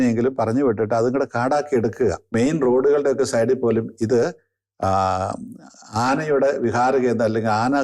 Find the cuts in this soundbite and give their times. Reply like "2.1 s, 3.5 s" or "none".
2.2 s